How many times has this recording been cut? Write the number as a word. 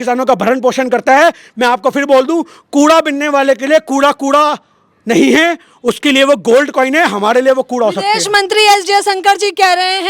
zero